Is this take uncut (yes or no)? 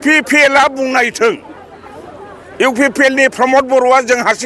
yes